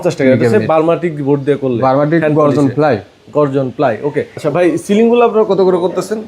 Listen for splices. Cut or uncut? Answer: cut